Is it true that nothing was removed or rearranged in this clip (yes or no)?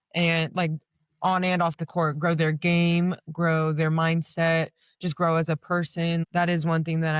no